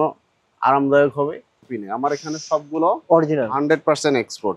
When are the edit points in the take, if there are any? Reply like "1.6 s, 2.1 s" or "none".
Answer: 1.6 s